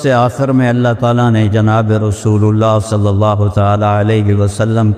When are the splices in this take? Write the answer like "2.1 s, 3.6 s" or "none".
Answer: none